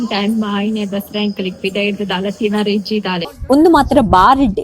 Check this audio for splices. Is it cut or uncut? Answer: cut